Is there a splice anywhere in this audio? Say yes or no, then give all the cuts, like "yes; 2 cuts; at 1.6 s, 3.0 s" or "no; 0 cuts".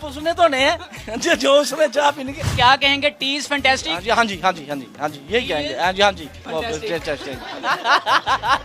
yes; 2 cuts; at 2.4 s, 6.3 s